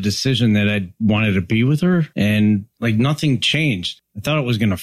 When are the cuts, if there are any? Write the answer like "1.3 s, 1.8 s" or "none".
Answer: 2.1 s, 2.7 s, 3.9 s